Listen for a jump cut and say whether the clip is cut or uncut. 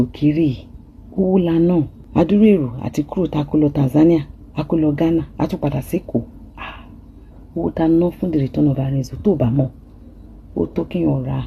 cut